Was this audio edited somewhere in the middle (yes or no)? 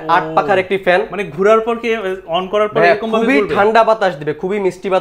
no